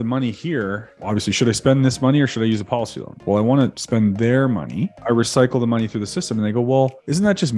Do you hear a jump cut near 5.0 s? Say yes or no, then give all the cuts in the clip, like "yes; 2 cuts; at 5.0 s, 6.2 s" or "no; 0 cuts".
yes; 4 cuts; at 1.0 s, 3.2 s, 3.8 s, 5.0 s